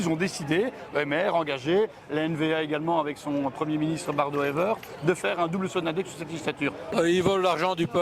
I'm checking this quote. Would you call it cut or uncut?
cut